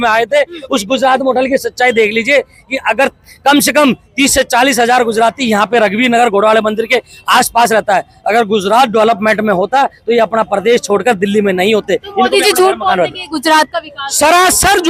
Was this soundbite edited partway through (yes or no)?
no